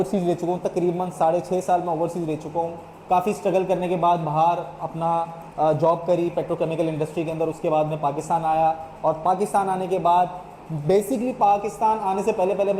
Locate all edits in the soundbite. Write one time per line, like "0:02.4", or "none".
none